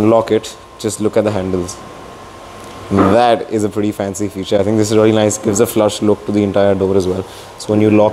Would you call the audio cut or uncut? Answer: uncut